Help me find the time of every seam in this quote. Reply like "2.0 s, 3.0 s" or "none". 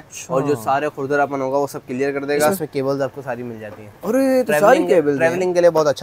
2.6 s